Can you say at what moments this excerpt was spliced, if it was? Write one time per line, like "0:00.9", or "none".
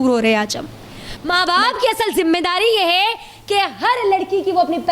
0:01.3